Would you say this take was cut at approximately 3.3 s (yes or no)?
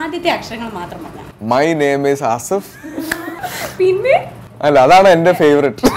yes